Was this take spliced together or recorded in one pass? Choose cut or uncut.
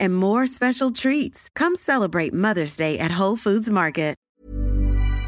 cut